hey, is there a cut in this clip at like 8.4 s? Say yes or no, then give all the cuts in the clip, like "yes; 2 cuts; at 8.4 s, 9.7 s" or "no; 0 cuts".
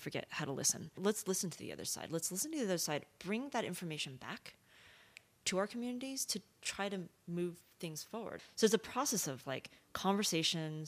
yes; 2 cuts; at 1.0 s, 8.4 s